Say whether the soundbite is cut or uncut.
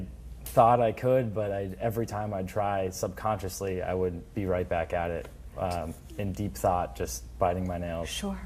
cut